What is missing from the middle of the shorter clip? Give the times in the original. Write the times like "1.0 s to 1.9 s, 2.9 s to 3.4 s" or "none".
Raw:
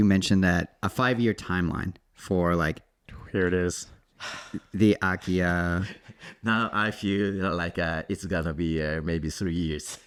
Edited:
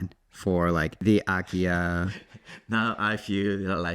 2.8 s to 4.7 s